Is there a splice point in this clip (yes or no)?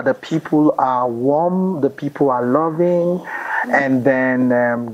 no